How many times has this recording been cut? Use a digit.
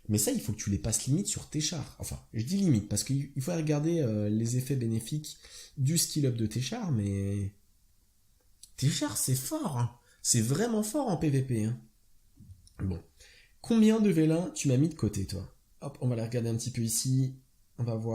1